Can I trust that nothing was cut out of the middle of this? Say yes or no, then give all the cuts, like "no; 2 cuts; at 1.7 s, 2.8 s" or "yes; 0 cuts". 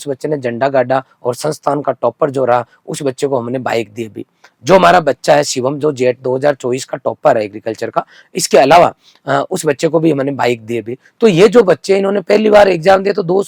yes; 0 cuts